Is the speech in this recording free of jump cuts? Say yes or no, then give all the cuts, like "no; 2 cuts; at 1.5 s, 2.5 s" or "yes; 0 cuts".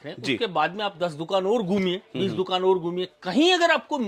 yes; 0 cuts